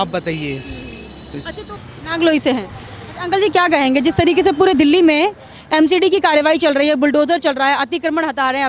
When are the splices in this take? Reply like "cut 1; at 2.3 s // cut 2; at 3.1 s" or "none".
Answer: cut 1; at 1.6 s